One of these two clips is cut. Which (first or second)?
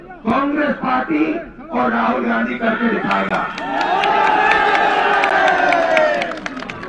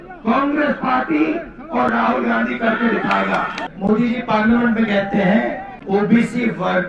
second